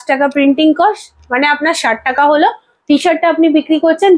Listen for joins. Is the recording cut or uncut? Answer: uncut